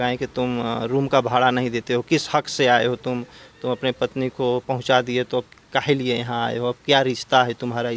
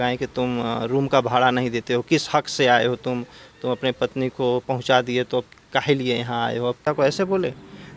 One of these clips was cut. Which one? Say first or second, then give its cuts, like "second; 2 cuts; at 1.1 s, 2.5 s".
second; 1 cut; at 6.8 s